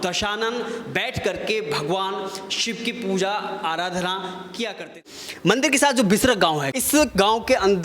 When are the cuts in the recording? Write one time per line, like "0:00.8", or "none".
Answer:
0:05.0
0:06.7